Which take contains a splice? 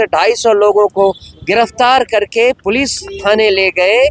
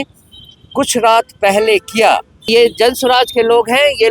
second; 1 cut; at 2.5 s

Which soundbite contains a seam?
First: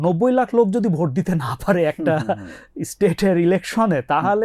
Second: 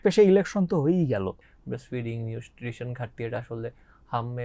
second; 1 cut; at 1.4 s

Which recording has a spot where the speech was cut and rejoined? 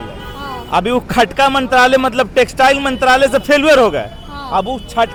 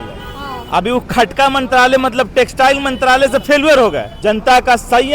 second; 1 cut; at 4.1 s

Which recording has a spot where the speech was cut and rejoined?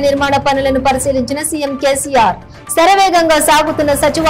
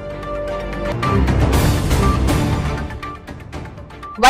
second; 1 cut; at 0.9 s

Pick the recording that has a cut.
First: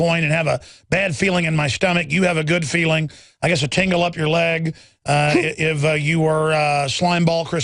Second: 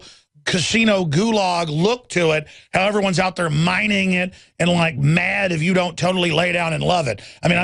second; 1 cut; at 3.3 s

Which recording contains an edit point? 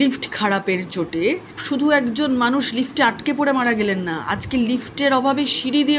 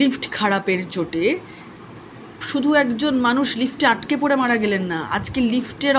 first; 1 cut; at 1.5 s

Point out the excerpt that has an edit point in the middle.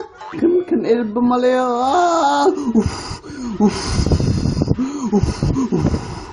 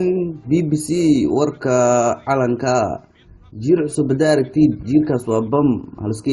second; 1 cut; at 1.6 s

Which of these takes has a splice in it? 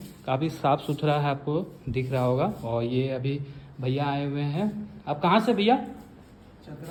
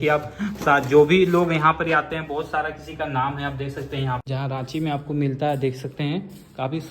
second; 1 cut; at 4.2 s

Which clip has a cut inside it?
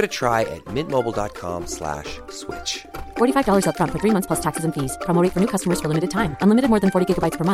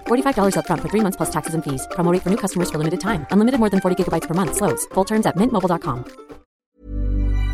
second; 1 cut; at 6.6 s

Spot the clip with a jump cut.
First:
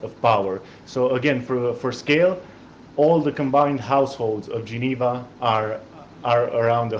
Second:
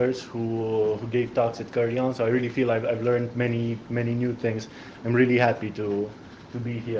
first; 1 cut; at 5.1 s

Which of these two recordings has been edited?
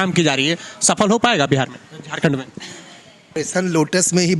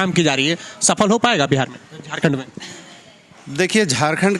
first; 1 cut; at 3.3 s

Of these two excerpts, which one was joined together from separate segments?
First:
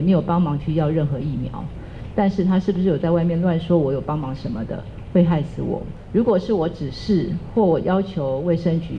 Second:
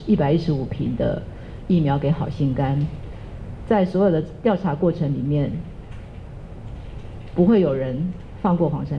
first; 1 cut; at 5.9 s

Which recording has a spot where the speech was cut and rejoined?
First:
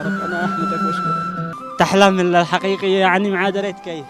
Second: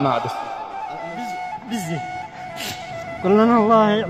first; 1 cut; at 1.6 s

